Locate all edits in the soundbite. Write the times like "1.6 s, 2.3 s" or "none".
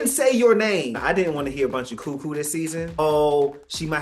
1.0 s, 3.0 s